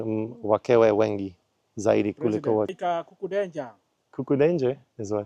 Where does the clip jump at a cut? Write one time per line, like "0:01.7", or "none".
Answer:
none